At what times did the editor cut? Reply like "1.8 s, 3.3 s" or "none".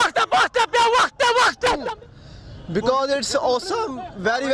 1.8 s